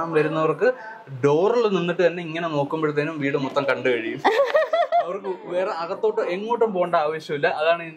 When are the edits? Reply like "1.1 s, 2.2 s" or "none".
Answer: none

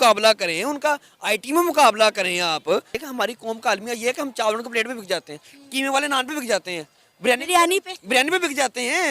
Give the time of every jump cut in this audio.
2.9 s

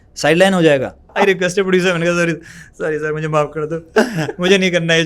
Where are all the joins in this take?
1.1 s

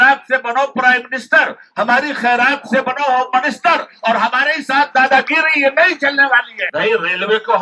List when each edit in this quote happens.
6.6 s

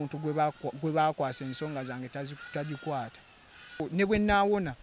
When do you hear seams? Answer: 3.9 s

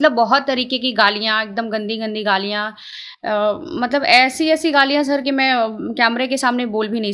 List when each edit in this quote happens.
none

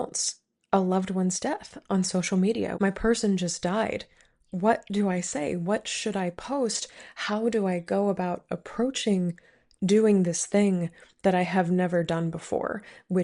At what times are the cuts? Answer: 2.8 s

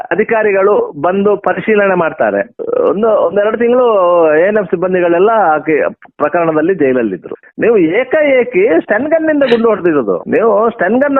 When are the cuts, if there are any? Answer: 2.6 s, 7.4 s

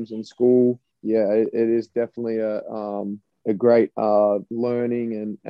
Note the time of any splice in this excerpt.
0.9 s, 3.3 s, 4.5 s

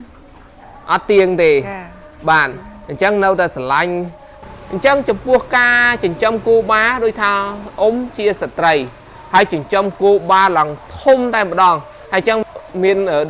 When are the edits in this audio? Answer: 4.3 s

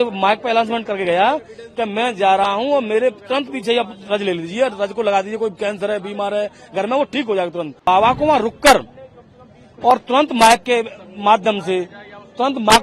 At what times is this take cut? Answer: 7.9 s

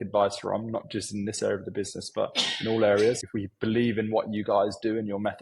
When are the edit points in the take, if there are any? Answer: 3.2 s

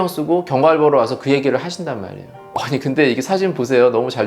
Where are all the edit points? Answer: 2.5 s

